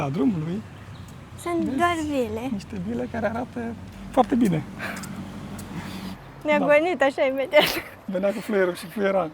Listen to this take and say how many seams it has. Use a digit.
2